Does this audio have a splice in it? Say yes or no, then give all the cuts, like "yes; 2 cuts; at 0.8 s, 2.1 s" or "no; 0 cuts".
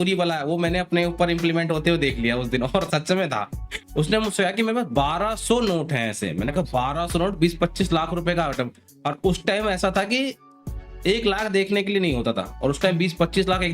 yes; 1 cut; at 3.8 s